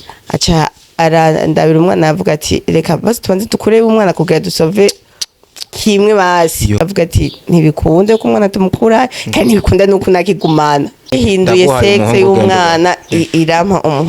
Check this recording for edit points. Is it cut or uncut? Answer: cut